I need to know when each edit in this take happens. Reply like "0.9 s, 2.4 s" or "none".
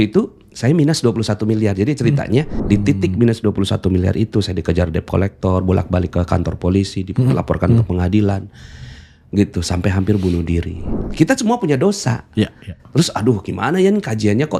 2.6 s, 11.0 s